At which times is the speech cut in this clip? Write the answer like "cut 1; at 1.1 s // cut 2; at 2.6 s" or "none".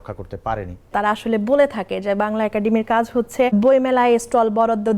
cut 1; at 0.9 s // cut 2; at 3.5 s